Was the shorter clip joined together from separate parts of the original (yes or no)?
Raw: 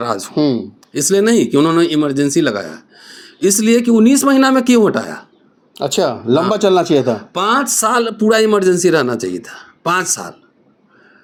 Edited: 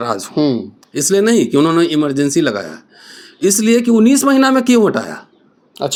no